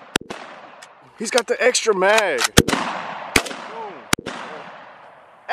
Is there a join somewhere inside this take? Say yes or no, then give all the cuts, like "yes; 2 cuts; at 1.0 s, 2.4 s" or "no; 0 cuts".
yes; 2 cuts; at 1.1 s, 2.5 s